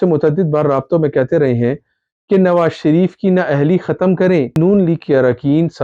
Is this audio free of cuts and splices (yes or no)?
no